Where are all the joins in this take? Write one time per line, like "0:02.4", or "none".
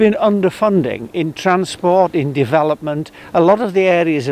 none